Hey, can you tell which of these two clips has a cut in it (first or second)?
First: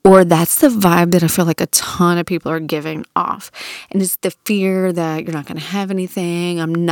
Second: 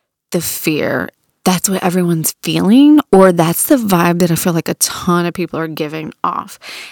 second